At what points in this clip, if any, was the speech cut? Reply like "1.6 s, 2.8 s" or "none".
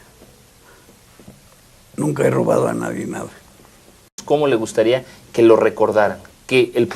4.2 s